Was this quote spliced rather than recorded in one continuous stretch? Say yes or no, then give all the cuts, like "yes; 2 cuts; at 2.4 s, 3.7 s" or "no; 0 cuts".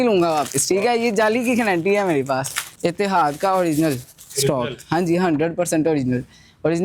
yes; 1 cut; at 2.6 s